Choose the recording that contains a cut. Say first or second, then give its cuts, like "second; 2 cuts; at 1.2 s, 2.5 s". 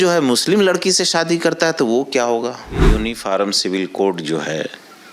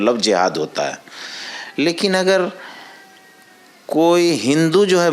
first; 1 cut; at 2.7 s